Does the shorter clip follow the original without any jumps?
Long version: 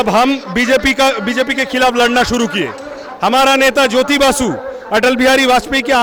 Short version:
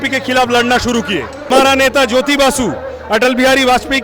no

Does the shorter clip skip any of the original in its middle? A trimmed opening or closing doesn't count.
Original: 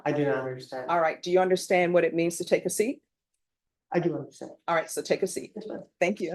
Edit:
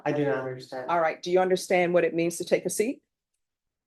no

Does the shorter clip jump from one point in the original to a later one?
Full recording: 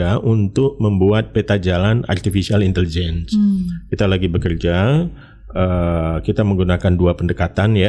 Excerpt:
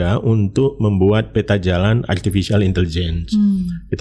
no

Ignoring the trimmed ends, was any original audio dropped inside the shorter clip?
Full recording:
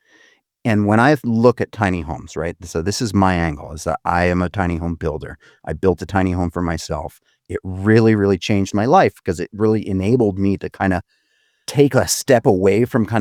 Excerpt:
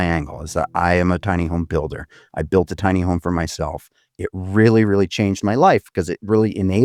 no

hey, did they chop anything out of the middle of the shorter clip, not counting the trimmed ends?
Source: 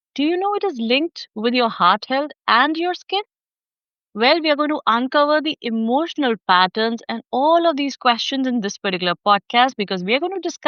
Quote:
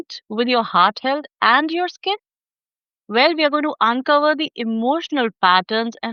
no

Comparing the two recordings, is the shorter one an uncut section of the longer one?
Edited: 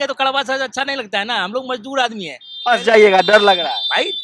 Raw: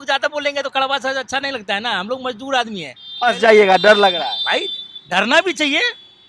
yes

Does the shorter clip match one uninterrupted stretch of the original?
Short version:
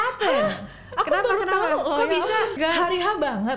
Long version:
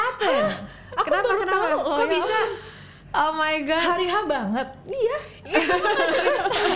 no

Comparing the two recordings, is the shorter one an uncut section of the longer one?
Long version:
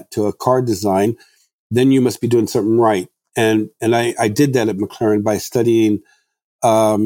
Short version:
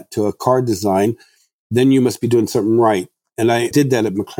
no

